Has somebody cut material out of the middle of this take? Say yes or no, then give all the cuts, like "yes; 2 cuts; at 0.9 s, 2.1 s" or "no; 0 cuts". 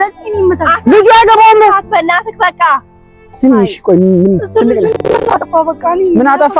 no; 0 cuts